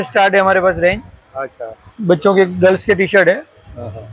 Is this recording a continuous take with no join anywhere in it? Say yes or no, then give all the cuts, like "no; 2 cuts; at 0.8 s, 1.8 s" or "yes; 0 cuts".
yes; 0 cuts